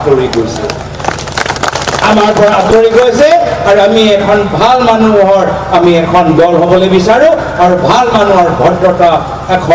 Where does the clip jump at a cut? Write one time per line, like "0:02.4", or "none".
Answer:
none